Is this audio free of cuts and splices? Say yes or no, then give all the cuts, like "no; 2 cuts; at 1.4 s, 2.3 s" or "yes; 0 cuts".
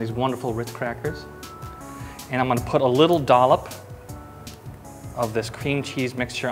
yes; 0 cuts